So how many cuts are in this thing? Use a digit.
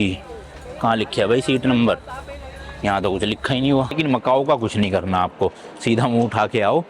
1